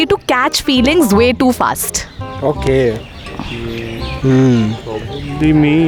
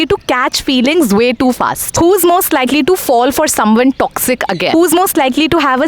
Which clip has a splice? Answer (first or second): second